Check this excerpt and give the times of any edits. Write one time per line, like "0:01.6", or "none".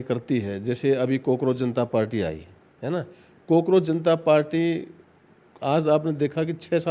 none